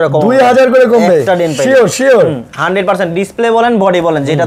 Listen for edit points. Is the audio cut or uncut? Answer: uncut